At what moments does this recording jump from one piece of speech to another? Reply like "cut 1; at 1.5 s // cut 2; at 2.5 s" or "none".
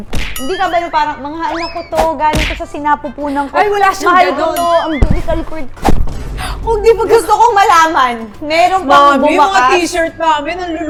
none